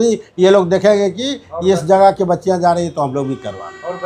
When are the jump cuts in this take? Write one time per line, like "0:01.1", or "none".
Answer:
none